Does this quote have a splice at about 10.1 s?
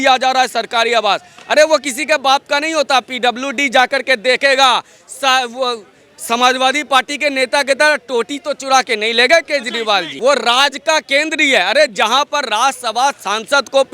yes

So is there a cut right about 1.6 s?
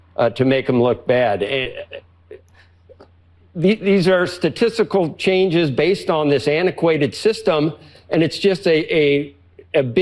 yes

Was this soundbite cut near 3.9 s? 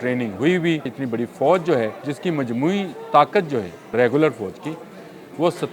yes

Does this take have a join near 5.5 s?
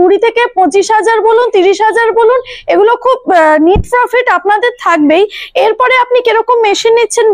no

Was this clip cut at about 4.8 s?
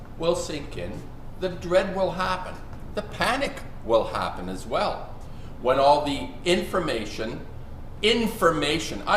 no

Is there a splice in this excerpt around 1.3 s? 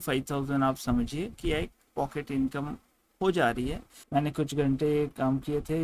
no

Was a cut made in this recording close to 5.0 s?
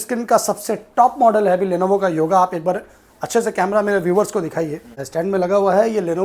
yes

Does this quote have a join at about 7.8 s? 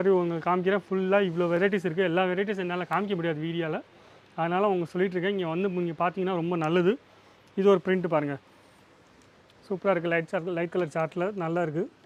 no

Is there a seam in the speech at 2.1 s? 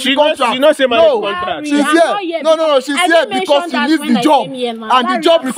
no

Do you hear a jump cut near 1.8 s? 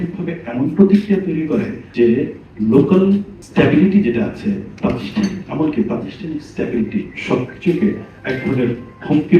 yes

